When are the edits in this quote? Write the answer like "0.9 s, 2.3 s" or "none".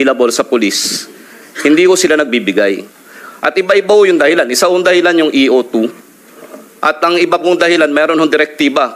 none